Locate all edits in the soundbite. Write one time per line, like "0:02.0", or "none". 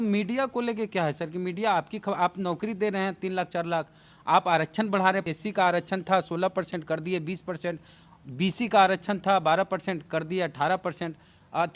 none